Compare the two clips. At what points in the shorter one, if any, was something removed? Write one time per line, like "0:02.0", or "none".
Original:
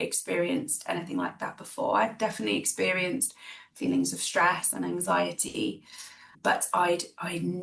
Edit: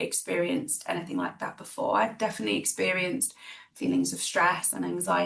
none